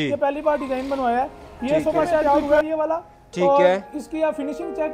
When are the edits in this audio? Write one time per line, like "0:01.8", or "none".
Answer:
0:02.2